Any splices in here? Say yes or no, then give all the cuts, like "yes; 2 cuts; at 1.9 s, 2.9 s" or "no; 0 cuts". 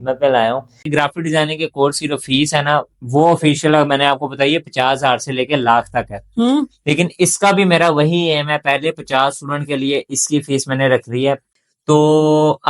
yes; 2 cuts; at 0.9 s, 11.5 s